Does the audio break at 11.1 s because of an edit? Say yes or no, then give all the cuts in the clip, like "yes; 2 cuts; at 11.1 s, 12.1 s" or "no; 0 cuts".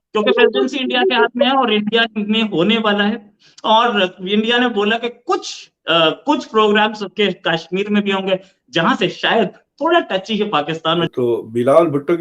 yes; 1 cut; at 11.1 s